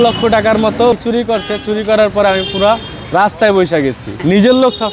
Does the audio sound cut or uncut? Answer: cut